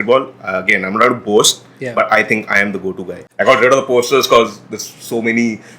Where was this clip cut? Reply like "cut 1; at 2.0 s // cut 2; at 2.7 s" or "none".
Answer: cut 1; at 3.2 s